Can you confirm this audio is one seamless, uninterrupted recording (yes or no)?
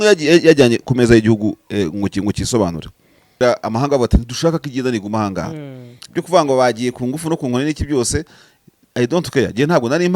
no